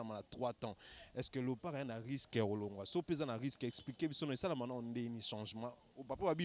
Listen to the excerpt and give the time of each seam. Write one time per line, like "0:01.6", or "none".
none